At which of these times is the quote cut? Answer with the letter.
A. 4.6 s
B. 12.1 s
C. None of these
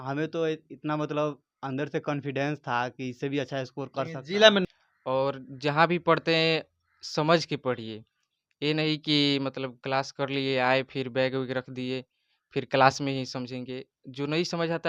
A